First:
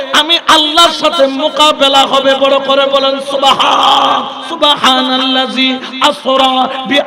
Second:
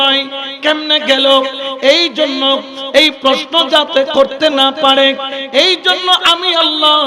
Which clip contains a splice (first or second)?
first